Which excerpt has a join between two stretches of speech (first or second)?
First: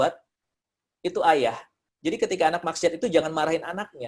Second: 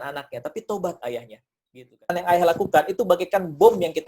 second